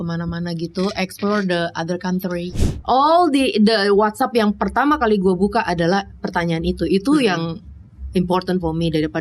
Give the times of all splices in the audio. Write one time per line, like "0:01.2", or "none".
0:02.5